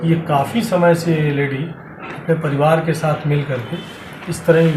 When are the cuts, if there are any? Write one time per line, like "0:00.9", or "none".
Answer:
none